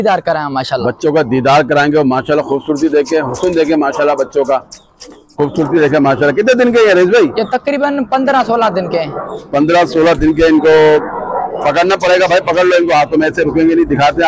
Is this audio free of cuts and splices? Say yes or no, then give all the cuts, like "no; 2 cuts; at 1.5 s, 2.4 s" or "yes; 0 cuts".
yes; 0 cuts